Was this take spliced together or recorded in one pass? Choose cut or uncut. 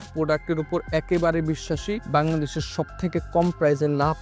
cut